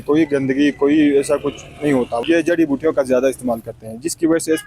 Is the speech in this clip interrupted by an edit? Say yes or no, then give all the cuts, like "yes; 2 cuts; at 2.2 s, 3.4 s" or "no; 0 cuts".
yes; 1 cut; at 2.2 s